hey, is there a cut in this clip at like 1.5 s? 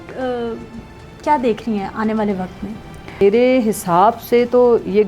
no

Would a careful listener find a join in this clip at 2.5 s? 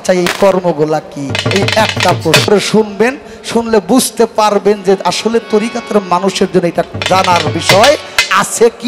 yes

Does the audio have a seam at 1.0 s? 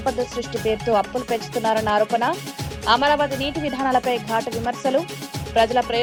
no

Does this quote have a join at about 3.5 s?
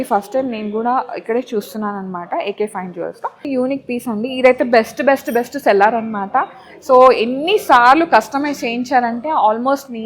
yes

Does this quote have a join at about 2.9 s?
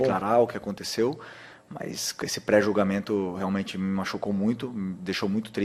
no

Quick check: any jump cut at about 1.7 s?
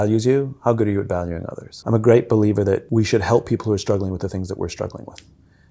yes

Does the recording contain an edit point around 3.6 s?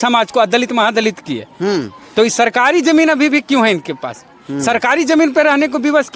no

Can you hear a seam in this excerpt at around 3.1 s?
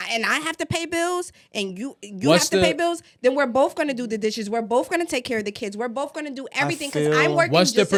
no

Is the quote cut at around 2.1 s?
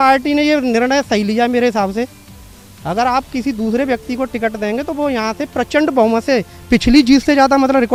no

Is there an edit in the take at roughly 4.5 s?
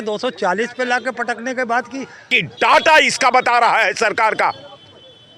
no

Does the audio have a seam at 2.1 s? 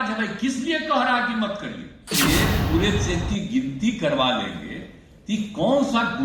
yes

